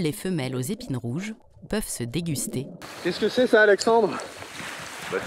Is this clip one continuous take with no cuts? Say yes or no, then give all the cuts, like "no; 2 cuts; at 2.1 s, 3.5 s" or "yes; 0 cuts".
no; 1 cut; at 2.8 s